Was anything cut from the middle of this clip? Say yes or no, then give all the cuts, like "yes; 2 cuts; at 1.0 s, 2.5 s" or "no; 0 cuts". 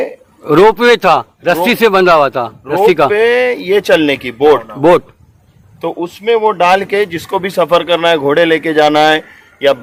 no; 0 cuts